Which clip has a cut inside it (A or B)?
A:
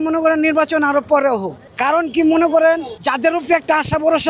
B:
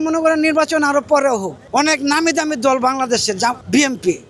B